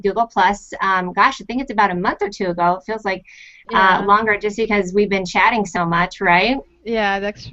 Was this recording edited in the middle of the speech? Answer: no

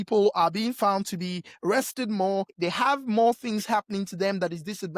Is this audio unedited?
no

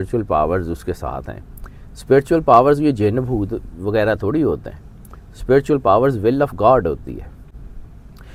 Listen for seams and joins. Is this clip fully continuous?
yes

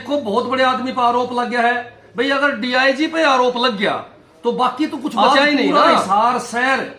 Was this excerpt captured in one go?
no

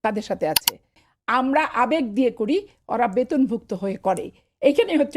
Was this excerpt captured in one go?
no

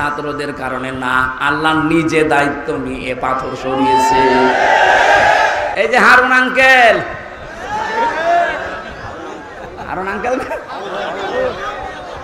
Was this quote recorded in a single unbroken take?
no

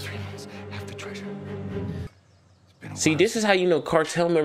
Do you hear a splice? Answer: yes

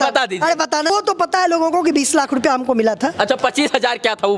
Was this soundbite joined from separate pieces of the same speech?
yes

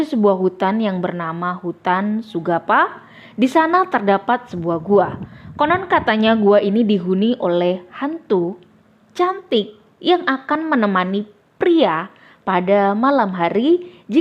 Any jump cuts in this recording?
no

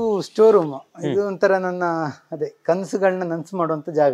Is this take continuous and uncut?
yes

